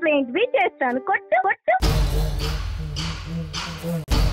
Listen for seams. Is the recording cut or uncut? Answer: cut